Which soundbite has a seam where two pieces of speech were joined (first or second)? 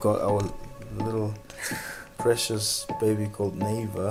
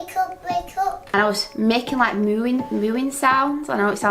second